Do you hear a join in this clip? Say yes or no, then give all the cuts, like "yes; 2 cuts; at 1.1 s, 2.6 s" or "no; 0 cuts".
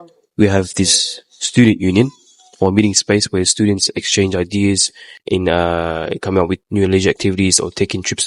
no; 0 cuts